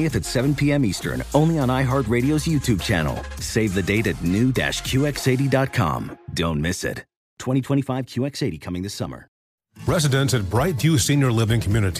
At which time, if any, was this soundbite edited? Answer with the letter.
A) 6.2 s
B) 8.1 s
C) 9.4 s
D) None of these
C